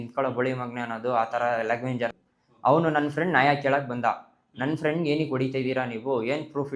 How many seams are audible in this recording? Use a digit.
1